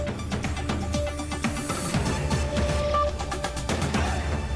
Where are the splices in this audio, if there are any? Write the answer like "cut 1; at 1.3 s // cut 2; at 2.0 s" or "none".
none